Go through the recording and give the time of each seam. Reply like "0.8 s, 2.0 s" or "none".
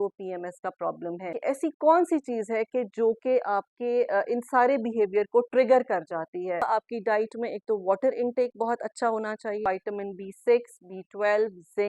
1.3 s, 6.6 s, 9.6 s